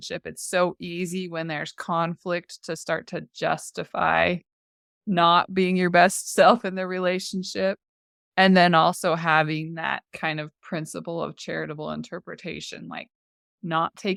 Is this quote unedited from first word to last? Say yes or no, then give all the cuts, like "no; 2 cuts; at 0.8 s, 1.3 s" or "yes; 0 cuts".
yes; 0 cuts